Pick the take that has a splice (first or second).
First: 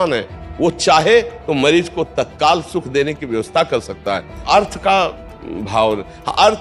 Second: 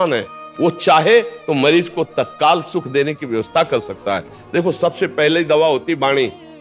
first